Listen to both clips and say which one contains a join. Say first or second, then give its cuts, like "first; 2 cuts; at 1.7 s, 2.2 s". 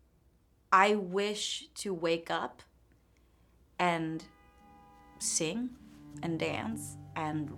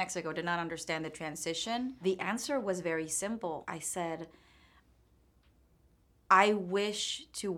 second; 2 cuts; at 2.0 s, 3.6 s